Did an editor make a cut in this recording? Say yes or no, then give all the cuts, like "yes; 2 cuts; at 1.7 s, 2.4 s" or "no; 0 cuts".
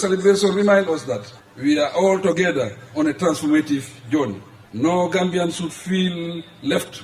no; 0 cuts